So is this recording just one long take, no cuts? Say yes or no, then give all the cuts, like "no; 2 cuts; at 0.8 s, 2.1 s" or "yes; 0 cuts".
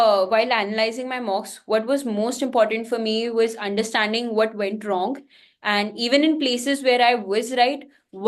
yes; 0 cuts